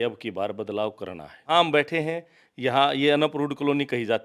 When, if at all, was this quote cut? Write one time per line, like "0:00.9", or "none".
0:01.5